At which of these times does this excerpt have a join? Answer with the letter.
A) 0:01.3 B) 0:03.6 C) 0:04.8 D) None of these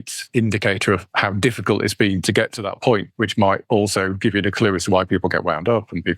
B